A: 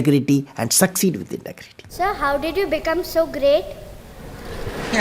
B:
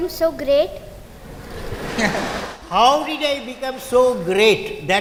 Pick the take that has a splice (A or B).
A